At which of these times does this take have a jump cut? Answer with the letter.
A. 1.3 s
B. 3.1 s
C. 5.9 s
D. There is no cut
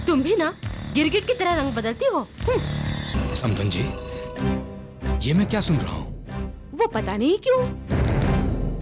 B